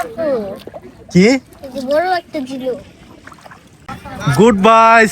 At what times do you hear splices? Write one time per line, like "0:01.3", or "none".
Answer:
0:03.9

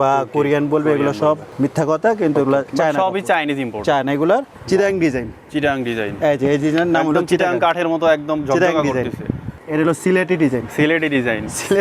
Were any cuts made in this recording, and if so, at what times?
0:02.7
0:04.5
0:09.5

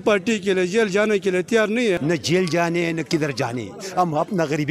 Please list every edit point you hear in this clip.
0:02.0

